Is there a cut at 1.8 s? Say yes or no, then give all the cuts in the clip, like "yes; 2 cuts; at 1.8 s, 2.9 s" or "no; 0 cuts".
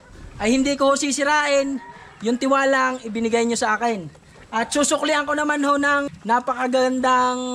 no; 1 cut; at 6.1 s